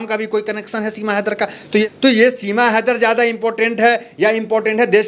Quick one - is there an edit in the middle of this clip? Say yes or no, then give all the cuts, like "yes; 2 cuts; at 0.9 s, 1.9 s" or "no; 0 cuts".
yes; 1 cut; at 1.8 s